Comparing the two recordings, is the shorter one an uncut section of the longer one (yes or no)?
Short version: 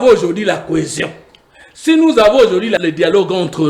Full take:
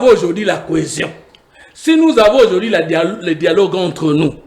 no